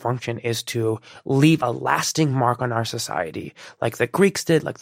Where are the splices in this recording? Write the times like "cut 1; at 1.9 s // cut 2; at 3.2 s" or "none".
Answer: cut 1; at 1.6 s